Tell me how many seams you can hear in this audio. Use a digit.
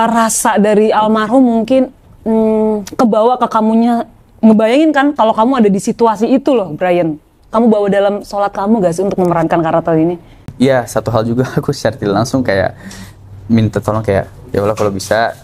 1